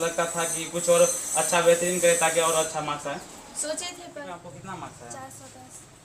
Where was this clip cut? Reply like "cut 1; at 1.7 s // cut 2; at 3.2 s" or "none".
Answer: cut 1; at 4.2 s